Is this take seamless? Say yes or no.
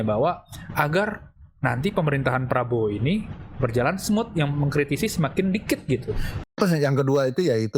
no